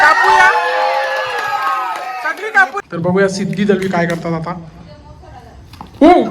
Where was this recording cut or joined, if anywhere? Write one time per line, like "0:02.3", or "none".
0:02.8